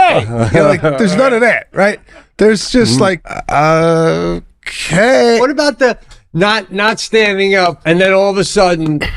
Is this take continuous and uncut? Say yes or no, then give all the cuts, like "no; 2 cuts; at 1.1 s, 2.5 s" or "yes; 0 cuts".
no; 3 cuts; at 3.3 s, 5.4 s, 7.8 s